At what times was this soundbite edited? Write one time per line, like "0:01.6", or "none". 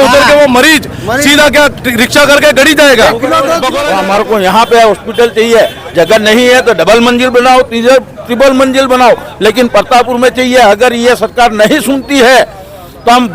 0:03.7